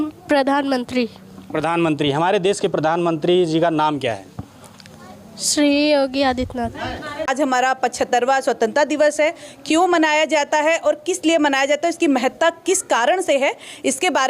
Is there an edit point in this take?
yes; 1 cut; at 7.3 s

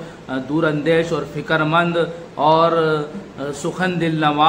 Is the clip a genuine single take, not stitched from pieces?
yes; 0 cuts

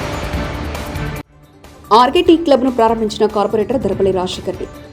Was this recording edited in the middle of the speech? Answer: no; 0 cuts

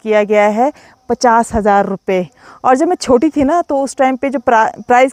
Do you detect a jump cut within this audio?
no; 0 cuts

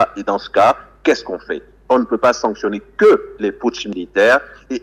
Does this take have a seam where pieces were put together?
no; 0 cuts

